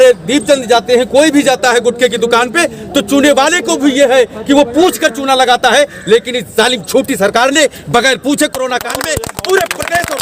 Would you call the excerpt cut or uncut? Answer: uncut